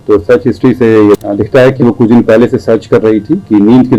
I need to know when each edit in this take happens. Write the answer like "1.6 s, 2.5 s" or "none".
1.3 s